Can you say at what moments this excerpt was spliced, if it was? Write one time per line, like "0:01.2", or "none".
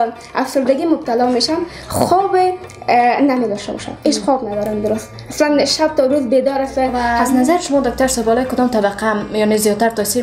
0:07.0

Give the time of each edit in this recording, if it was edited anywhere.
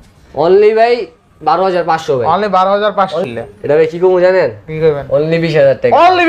0:03.2

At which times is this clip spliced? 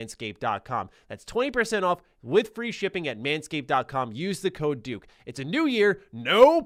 none

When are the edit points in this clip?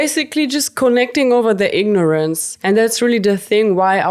0:02.5

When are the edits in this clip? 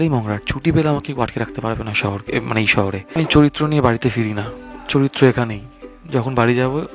0:03.1

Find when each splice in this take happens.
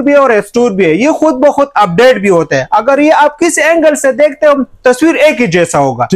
none

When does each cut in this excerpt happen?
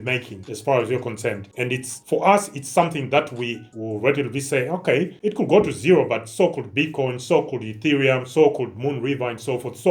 none

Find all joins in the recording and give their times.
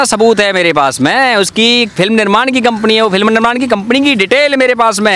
none

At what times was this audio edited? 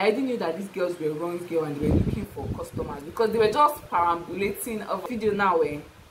0:05.0

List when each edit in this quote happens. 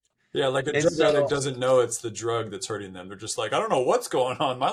none

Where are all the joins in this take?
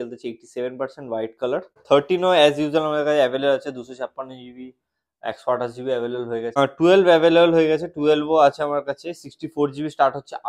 0:01.7
0:06.6

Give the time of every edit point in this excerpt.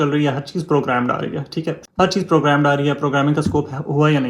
0:01.8

